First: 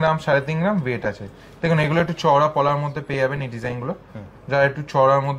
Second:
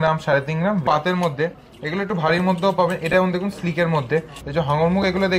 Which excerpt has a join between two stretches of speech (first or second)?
second